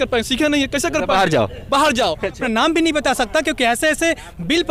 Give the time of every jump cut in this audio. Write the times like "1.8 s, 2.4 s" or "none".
2.4 s